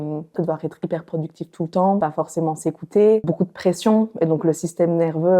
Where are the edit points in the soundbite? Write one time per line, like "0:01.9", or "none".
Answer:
0:02.0
0:03.3